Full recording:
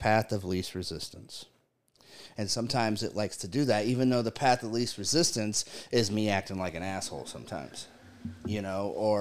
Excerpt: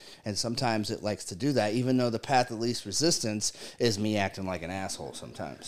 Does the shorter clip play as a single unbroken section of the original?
yes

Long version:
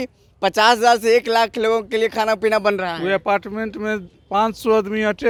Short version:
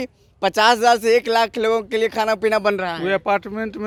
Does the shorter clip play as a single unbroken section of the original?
yes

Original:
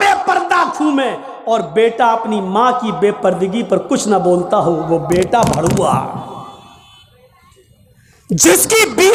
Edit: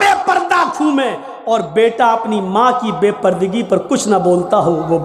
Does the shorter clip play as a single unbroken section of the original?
yes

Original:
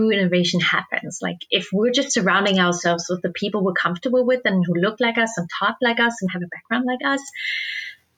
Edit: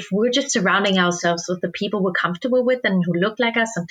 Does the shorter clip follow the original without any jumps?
yes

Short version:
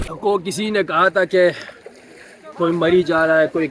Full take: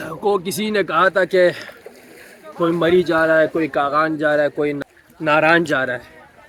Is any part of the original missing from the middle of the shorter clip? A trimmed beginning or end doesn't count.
no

